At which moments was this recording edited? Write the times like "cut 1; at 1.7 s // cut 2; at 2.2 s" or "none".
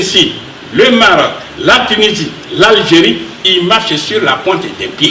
none